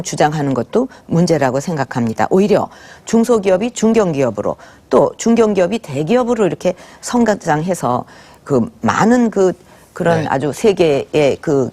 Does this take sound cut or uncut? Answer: cut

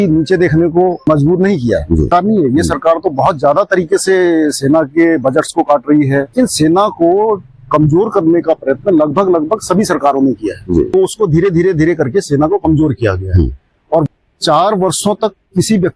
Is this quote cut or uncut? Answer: cut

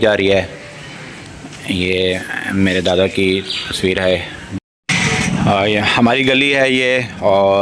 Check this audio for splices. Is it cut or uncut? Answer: cut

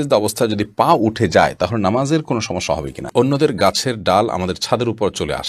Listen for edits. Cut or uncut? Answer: cut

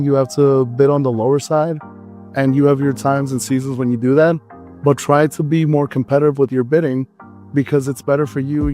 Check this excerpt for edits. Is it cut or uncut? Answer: uncut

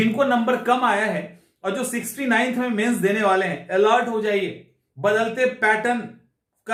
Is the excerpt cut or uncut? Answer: uncut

